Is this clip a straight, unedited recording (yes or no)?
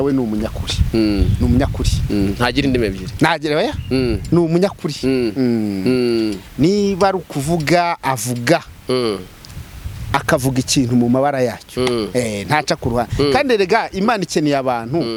yes